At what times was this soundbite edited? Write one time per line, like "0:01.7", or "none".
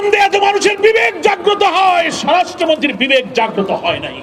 none